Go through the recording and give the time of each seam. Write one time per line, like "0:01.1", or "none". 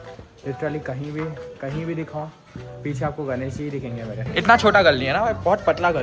0:04.2